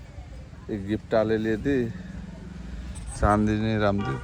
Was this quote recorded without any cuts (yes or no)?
yes